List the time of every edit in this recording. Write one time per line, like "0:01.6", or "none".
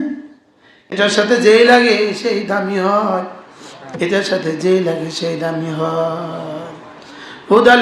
0:00.9